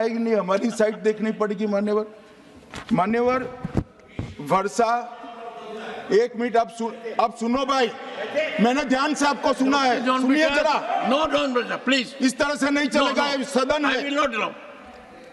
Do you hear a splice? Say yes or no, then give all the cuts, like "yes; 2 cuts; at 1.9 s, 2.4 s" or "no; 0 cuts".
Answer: no; 0 cuts